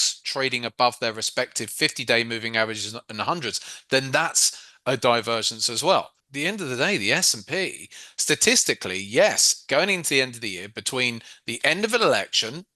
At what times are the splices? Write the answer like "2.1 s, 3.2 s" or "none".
6.2 s